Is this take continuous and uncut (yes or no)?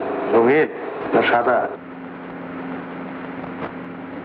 yes